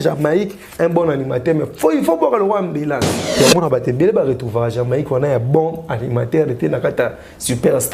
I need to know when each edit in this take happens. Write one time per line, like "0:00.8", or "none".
0:03.2